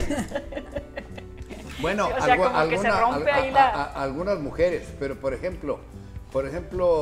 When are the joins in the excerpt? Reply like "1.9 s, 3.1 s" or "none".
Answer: none